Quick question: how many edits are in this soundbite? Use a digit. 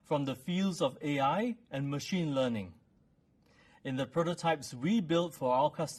0